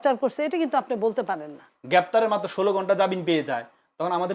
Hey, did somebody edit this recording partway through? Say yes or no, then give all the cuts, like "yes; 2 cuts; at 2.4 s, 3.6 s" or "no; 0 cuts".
yes; 1 cut; at 1.7 s